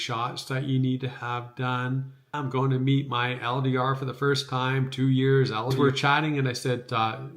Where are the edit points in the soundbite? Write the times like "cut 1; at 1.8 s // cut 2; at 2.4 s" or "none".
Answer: cut 1; at 2.4 s // cut 2; at 5.7 s